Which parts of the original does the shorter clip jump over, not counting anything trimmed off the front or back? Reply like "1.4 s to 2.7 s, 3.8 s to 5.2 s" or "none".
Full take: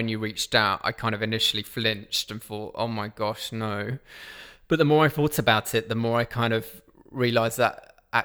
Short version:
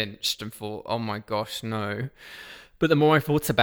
none